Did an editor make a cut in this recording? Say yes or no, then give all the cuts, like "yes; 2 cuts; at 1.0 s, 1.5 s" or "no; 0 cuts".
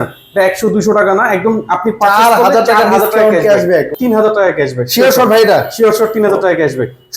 yes; 1 cut; at 3.9 s